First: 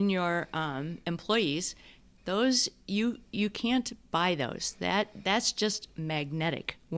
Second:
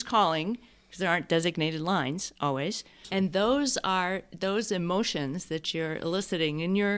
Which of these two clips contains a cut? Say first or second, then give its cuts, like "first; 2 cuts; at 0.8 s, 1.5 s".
second; 1 cut; at 2.9 s